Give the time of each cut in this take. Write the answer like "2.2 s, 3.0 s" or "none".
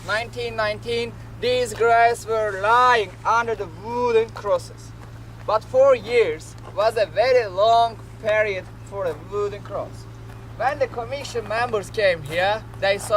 8.4 s